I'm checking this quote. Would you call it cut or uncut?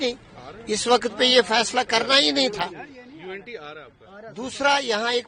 uncut